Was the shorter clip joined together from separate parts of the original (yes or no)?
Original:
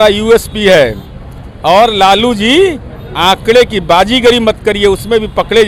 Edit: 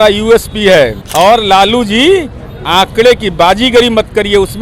yes